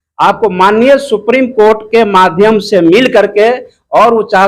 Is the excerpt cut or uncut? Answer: uncut